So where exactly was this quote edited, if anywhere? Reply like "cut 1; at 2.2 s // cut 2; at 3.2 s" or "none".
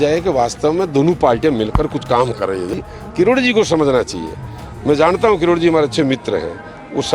cut 1; at 2.7 s